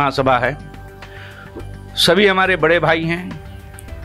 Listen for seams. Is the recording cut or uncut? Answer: uncut